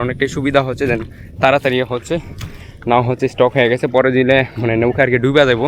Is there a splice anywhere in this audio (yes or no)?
no